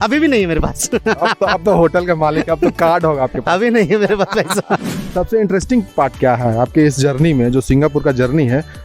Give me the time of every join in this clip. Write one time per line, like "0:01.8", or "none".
0:05.0